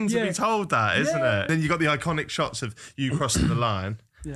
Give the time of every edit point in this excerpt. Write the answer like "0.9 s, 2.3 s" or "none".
1.5 s